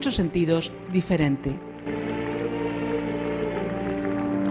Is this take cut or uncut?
uncut